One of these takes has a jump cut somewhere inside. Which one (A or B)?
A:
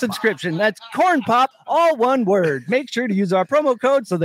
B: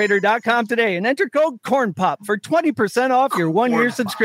A